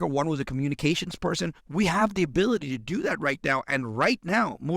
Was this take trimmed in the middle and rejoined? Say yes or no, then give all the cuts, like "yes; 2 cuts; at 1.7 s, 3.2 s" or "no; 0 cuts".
yes; 1 cut; at 1.6 s